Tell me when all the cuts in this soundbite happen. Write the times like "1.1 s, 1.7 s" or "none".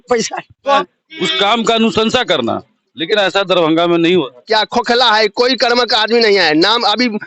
0.8 s, 4.4 s